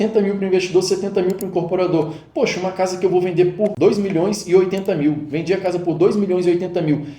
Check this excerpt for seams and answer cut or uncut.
cut